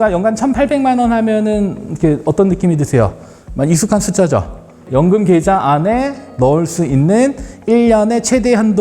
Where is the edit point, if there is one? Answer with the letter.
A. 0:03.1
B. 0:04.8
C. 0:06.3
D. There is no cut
B